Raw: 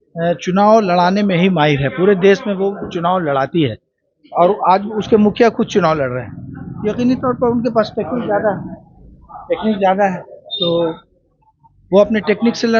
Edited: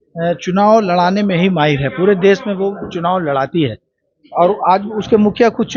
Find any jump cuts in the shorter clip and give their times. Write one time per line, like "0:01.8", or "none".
none